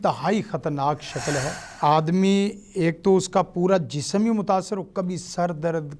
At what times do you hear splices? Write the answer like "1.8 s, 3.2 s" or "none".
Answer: 1.6 s